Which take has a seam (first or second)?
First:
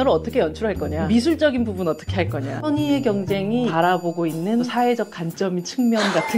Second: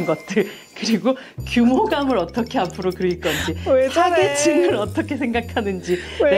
first